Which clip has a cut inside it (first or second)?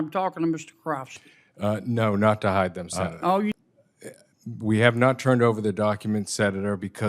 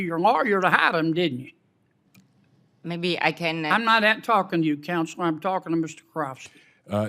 first